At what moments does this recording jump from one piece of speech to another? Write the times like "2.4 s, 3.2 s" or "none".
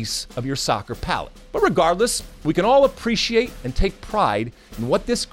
1.4 s, 3.6 s